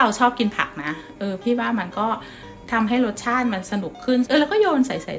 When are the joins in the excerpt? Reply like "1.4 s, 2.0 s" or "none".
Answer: 4.3 s